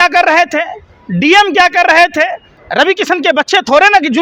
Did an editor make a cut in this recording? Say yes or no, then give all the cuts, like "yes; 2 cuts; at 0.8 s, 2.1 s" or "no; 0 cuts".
yes; 1 cut; at 2.6 s